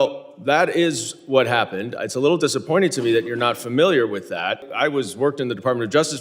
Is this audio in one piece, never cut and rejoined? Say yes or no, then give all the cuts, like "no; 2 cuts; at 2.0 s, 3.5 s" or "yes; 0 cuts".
no; 1 cut; at 4.7 s